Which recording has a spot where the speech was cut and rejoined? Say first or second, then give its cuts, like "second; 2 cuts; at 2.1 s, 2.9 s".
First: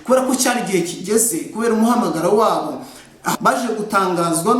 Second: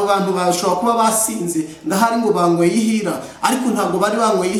first; 1 cut; at 3.3 s